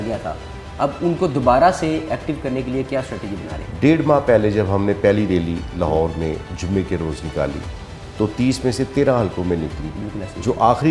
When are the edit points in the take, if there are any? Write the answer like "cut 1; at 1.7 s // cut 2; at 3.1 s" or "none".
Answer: none